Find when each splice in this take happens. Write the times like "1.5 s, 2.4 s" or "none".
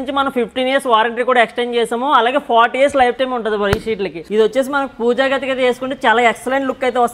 4.3 s

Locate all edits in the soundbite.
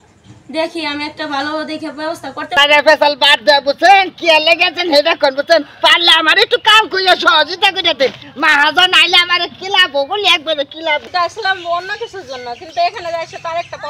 2.6 s, 11.0 s

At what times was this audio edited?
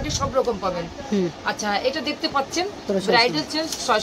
2.8 s

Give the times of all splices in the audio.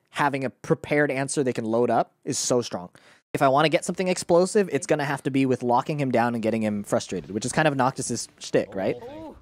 3.4 s

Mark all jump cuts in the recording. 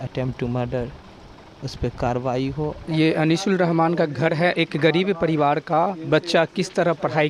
2.8 s

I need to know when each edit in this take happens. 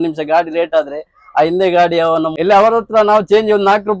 2.3 s

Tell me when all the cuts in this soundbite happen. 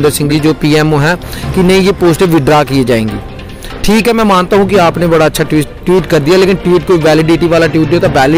none

